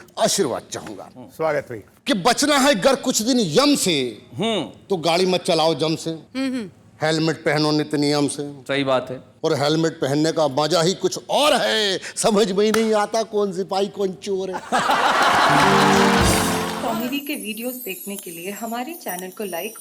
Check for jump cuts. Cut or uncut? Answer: cut